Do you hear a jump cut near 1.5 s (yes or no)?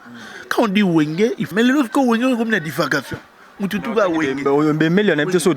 yes